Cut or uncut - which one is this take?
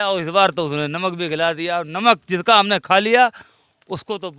uncut